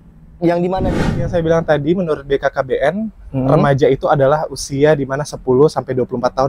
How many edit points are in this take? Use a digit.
1